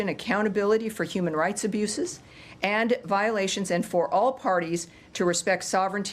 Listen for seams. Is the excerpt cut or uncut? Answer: cut